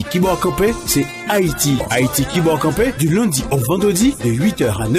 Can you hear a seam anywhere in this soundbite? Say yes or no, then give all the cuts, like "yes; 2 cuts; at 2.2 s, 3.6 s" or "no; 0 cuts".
yes; 1 cut; at 1.9 s